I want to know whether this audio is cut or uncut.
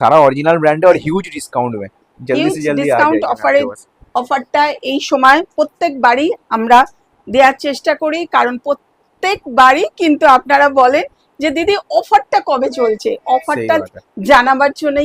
uncut